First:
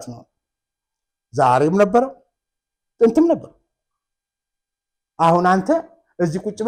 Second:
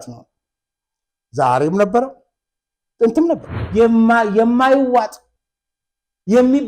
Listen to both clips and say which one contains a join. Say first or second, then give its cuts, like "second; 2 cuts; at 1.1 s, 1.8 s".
second; 1 cut; at 3.5 s